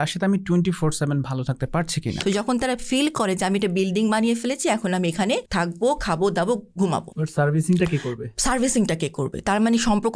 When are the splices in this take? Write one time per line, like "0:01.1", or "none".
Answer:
0:02.2
0:05.5
0:07.2